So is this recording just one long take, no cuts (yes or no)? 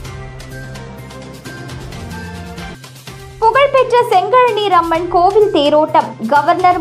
yes